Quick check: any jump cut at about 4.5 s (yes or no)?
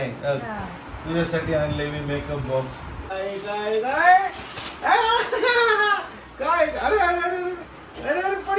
no